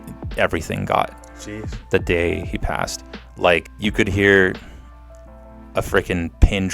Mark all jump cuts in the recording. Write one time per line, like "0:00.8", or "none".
0:03.7